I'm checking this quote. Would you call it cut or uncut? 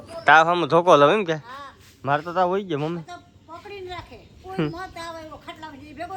uncut